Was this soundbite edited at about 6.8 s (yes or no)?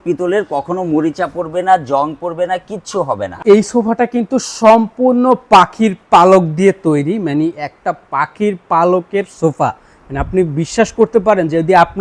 no